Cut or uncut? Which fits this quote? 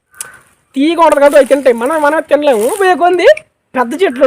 cut